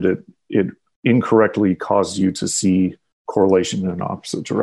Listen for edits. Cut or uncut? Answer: uncut